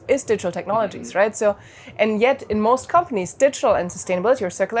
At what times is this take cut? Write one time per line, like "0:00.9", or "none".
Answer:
none